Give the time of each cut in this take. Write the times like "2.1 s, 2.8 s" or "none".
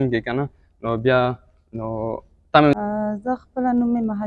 2.7 s